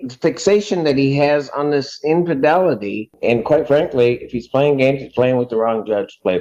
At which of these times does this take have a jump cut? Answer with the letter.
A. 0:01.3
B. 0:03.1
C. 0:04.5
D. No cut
B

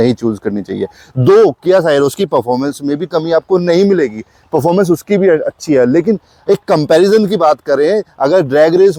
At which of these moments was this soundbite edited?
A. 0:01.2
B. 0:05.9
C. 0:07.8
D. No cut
D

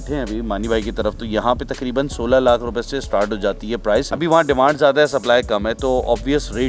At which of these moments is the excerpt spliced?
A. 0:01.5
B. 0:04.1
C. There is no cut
B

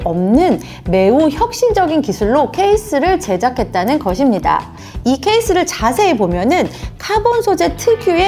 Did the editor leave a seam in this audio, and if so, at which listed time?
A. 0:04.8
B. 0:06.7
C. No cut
A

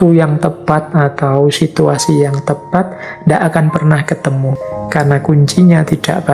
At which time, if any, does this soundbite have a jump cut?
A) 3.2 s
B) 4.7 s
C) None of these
B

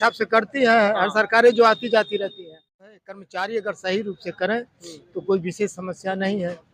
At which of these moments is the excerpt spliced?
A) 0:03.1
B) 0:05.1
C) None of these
A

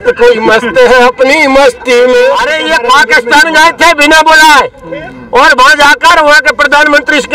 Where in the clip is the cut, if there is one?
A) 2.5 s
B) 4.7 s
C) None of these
A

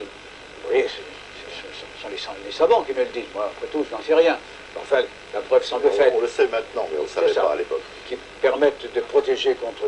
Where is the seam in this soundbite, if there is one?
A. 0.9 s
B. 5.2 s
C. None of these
B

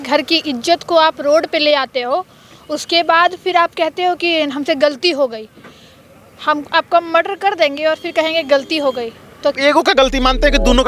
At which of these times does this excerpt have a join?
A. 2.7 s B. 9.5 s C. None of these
B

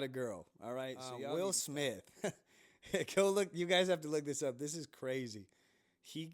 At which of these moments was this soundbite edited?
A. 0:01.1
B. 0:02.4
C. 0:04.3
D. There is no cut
A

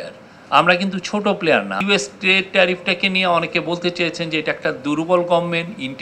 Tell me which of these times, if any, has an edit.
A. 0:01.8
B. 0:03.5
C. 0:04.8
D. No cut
A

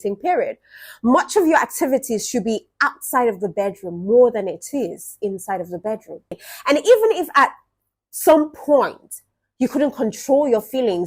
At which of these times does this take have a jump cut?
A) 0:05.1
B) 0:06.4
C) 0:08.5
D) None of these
B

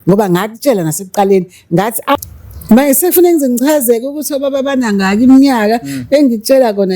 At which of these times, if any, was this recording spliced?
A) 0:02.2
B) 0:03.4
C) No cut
A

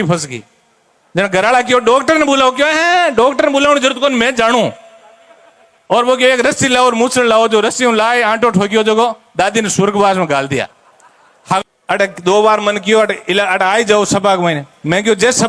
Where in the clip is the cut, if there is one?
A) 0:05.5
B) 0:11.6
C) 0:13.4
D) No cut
B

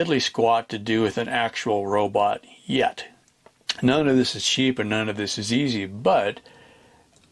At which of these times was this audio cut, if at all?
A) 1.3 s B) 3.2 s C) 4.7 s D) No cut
B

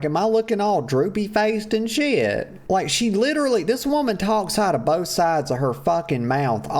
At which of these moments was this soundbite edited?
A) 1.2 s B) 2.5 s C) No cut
B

